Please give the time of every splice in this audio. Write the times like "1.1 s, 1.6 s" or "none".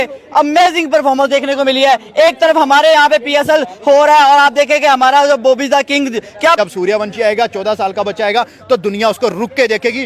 6.6 s